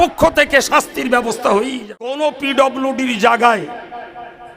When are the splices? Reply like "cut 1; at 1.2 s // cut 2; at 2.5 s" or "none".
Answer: cut 1; at 2.2 s